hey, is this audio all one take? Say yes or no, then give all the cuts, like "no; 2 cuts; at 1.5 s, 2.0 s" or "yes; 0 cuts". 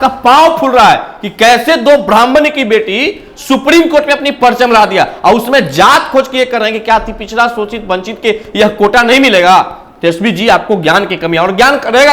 yes; 0 cuts